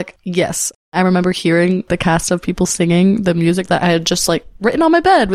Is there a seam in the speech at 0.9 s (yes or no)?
yes